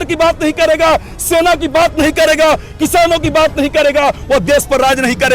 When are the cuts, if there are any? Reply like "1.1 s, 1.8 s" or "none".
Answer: none